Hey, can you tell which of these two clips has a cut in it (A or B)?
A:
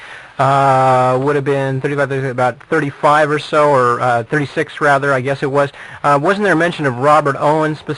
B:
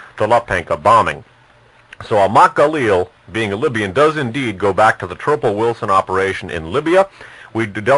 A